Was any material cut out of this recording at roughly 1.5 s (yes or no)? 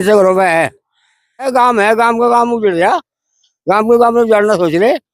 yes